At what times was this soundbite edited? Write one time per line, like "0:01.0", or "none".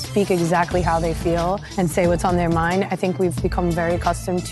0:01.7